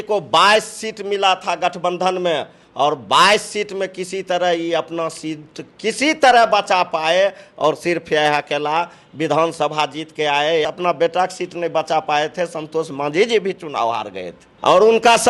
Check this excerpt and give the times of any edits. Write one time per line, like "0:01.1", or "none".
0:10.6